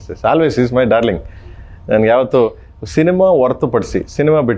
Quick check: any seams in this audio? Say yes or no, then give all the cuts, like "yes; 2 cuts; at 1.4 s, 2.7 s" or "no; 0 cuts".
no; 0 cuts